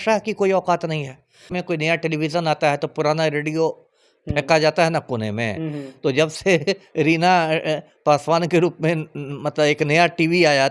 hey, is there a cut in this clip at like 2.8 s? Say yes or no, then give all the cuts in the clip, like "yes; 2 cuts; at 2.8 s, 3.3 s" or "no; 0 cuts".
no; 1 cut; at 1.6 s